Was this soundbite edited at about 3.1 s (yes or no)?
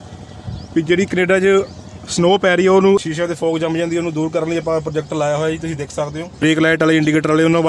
yes